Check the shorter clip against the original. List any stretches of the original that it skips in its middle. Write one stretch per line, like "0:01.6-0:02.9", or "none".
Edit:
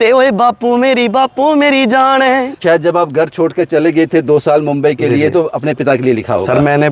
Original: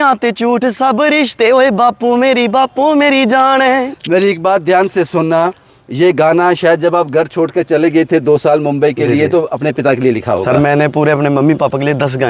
0:04.0-0:06.6